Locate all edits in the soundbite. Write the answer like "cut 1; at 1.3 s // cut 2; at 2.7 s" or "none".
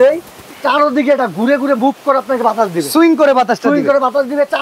none